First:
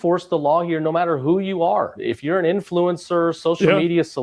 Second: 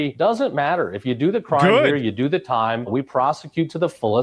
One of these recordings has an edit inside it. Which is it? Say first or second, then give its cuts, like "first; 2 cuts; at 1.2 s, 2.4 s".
second; 1 cut; at 2.9 s